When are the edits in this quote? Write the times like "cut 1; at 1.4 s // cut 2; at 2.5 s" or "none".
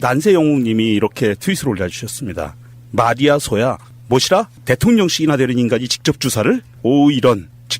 cut 1; at 5.7 s